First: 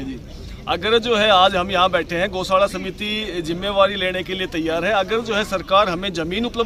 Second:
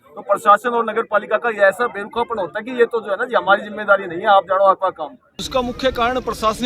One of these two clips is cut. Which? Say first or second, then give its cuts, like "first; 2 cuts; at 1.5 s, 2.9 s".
second; 1 cut; at 5.3 s